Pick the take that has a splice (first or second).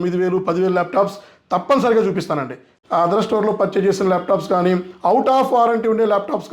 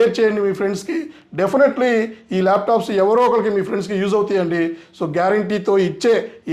first